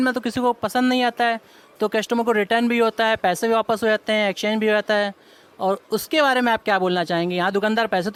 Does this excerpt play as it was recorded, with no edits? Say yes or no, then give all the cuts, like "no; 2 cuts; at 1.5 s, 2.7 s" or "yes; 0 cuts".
yes; 0 cuts